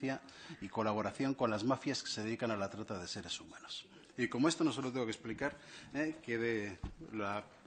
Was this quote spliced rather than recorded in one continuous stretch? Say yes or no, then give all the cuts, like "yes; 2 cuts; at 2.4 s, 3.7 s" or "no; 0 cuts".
yes; 1 cut; at 4.8 s